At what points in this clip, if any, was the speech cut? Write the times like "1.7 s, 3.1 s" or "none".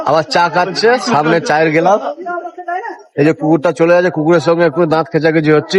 none